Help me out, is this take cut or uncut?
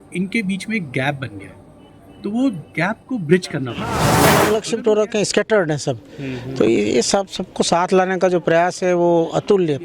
cut